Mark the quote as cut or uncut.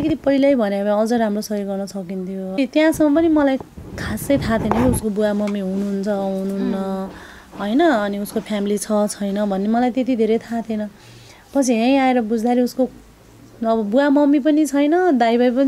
cut